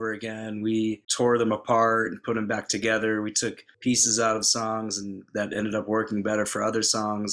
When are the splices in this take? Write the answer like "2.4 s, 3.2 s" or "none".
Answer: 1.1 s